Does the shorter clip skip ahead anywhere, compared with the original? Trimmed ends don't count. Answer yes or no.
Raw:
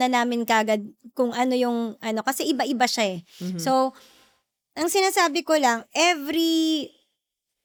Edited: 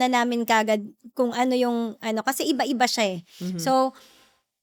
no